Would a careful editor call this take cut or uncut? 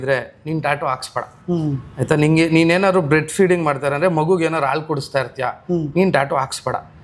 uncut